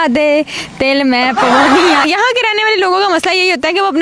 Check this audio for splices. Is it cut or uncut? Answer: cut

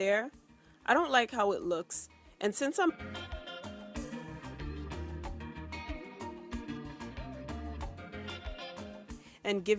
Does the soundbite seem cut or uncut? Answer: uncut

